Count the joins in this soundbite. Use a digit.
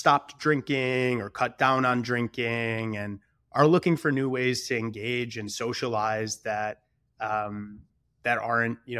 0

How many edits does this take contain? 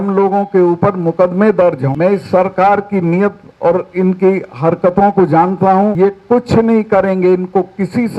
2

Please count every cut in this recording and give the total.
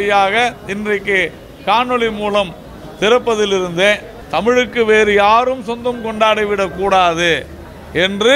1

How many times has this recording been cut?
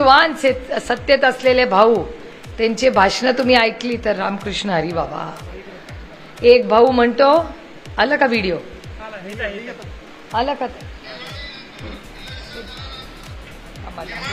0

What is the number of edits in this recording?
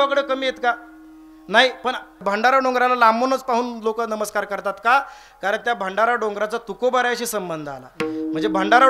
1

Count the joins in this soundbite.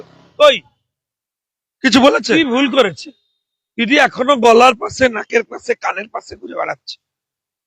1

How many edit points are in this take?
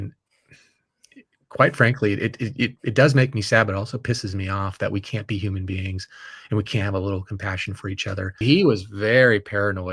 1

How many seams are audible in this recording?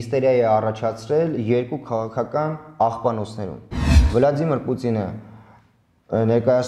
1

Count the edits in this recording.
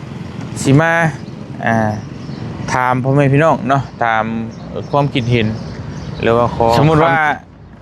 1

